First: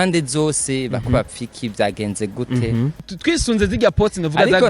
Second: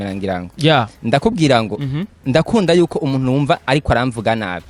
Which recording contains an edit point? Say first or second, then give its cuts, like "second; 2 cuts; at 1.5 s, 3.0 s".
first; 1 cut; at 3.0 s